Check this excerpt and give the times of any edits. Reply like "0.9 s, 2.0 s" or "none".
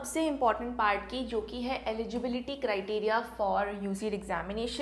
none